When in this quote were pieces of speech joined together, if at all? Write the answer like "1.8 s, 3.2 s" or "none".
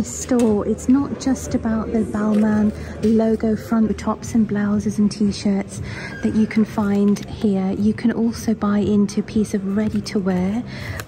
none